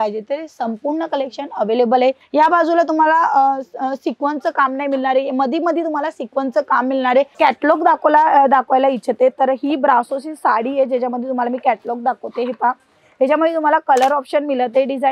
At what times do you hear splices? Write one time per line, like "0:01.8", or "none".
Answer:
0:02.2
0:07.3